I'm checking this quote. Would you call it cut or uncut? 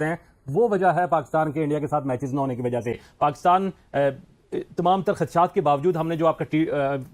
uncut